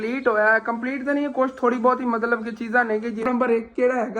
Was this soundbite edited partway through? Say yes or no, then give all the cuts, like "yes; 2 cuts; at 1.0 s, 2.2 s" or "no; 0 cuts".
yes; 1 cut; at 3.3 s